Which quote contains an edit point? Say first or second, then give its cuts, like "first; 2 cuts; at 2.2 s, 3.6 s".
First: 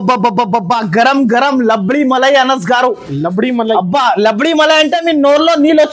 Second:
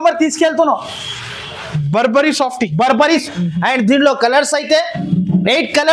second; 1 cut; at 3.2 s